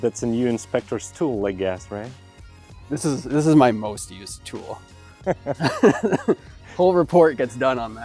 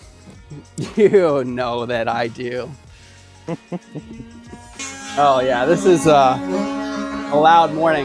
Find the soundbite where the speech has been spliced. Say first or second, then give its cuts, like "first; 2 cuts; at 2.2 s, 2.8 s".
second; 1 cut; at 4.9 s